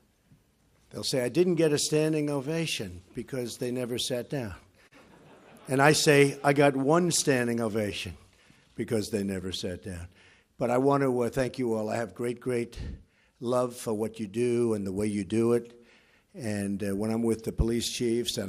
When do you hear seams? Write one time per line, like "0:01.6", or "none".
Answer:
none